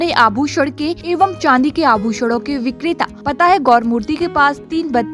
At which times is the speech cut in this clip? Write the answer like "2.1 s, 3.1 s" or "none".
1.0 s, 3.2 s